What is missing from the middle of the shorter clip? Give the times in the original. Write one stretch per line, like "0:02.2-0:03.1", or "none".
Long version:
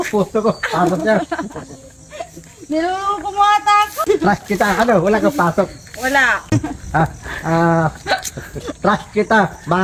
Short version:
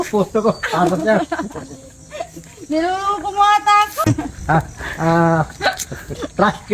0:04.0-0:06.4